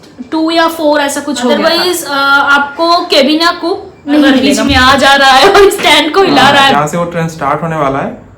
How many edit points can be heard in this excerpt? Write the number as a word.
three